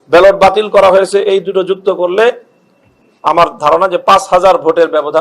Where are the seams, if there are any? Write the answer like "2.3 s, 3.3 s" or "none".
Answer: none